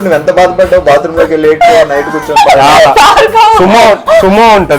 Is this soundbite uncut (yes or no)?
yes